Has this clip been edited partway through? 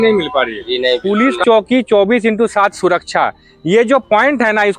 yes; 1 cut; at 1.0 s

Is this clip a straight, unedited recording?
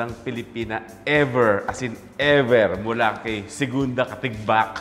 yes; 0 cuts

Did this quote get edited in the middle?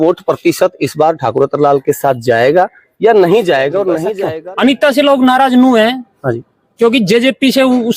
yes; 1 cut; at 4.1 s

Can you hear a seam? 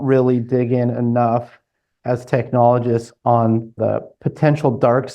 no; 0 cuts

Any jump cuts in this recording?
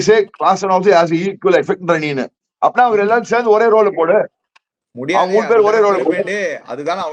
no; 0 cuts

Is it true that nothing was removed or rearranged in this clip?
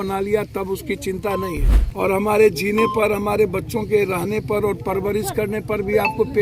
no; 1 cut; at 1.8 s

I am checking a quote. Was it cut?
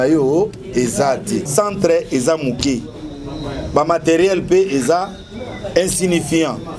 yes; 1 cut; at 1.5 s

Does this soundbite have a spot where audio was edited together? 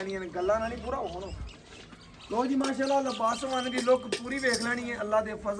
no; 0 cuts

